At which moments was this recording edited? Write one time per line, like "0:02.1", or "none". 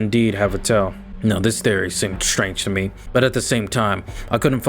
0:01.0
0:03.0